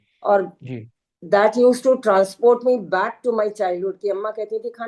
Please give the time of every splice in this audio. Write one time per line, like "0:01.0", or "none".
none